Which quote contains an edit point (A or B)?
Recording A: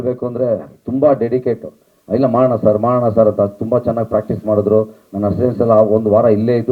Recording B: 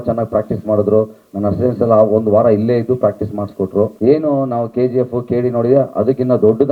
B